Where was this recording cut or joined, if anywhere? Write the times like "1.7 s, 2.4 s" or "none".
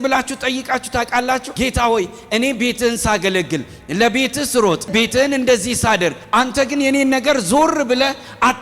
1.5 s, 4.9 s, 6.2 s